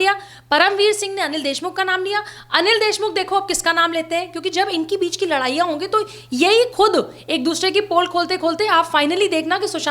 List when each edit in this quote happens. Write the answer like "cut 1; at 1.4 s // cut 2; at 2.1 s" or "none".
none